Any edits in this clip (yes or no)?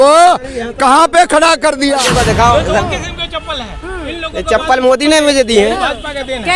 yes